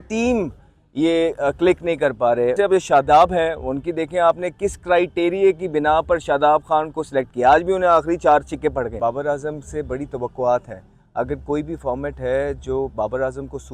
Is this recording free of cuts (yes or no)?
no